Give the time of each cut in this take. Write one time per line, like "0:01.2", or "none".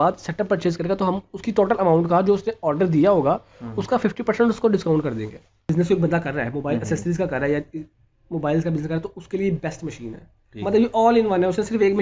0:05.7